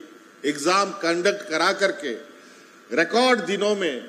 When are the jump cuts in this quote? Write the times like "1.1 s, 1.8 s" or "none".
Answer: none